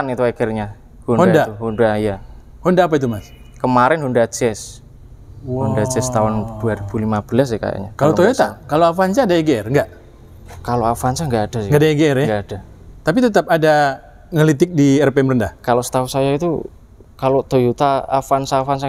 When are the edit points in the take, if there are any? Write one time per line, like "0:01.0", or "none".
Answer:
none